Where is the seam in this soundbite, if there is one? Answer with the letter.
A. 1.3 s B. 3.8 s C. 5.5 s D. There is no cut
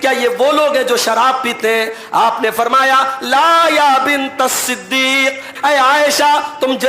C